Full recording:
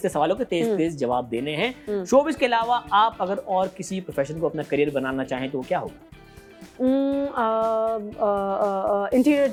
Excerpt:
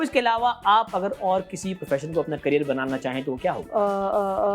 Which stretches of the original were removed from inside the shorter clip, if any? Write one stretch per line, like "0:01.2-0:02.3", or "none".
0:05.9-0:08.1